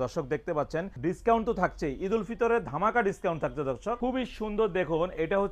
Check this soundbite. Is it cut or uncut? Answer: cut